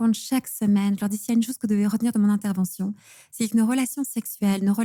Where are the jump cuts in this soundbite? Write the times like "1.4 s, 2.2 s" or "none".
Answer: none